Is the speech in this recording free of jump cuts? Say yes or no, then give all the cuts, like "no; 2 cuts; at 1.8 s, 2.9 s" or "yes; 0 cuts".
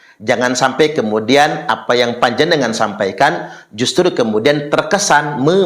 yes; 0 cuts